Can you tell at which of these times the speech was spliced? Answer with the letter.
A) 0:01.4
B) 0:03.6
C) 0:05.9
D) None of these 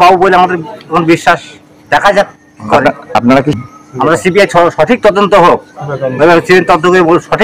B